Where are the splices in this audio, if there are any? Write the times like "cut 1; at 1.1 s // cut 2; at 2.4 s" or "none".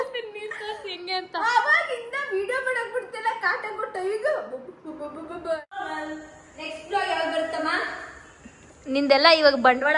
cut 1; at 5.6 s